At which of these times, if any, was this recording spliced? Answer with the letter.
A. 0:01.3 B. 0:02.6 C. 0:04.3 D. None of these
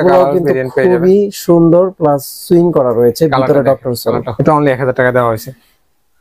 C